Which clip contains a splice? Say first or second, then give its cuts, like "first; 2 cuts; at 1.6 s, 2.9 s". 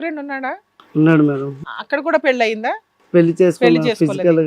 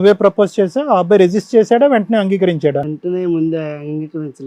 first; 1 cut; at 1.7 s